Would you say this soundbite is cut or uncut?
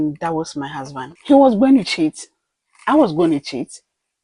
cut